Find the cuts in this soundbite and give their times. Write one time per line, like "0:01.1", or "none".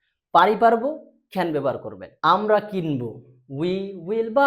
0:02.1